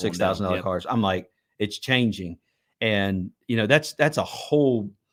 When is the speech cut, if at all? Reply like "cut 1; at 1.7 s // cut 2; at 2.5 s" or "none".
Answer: none